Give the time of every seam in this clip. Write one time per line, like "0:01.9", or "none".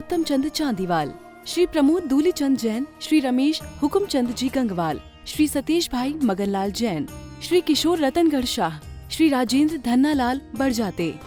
none